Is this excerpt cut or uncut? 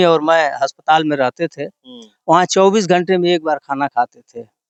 uncut